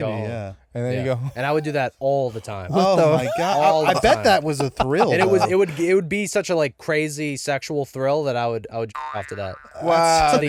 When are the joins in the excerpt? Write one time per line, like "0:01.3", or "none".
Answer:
none